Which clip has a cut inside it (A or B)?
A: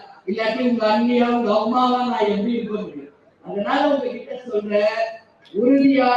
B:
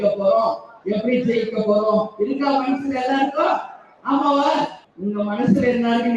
B